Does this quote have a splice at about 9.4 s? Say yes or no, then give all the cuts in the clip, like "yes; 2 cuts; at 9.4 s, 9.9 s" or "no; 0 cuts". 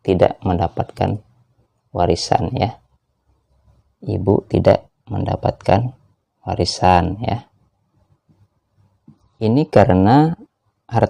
yes; 1 cut; at 9.4 s